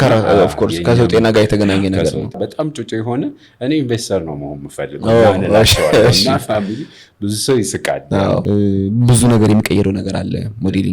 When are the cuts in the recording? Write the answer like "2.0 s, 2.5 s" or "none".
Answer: 2.4 s, 8.4 s